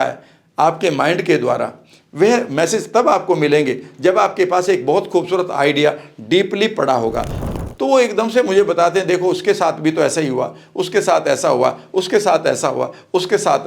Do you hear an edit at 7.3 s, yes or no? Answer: yes